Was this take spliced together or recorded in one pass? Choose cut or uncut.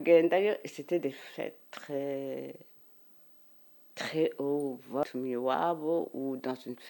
cut